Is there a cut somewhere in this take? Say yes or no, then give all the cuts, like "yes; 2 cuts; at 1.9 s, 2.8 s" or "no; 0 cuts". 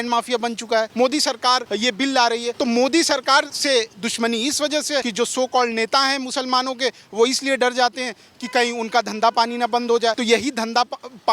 yes; 5 cuts; at 0.9 s, 2.2 s, 3.5 s, 5.1 s, 10.2 s